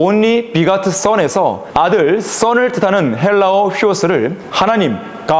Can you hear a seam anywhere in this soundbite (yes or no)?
yes